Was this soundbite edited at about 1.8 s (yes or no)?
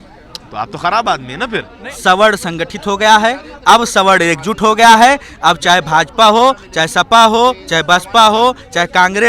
yes